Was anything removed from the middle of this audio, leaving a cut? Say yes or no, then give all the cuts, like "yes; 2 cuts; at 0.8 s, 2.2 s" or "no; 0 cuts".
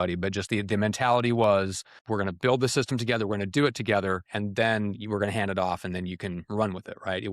yes; 1 cut; at 1.9 s